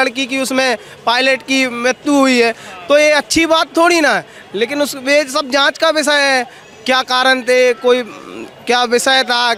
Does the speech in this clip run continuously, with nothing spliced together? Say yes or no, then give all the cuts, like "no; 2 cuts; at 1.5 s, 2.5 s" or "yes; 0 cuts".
yes; 0 cuts